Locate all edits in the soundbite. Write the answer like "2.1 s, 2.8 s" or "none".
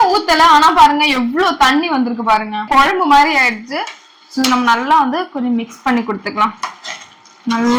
none